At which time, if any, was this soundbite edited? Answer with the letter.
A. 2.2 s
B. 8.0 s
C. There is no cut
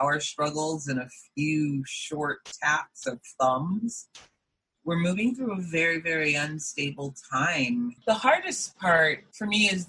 C